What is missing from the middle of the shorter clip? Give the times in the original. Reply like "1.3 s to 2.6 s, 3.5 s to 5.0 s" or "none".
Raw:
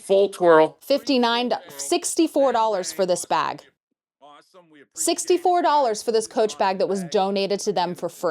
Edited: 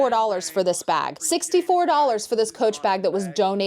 3.6 s to 4.9 s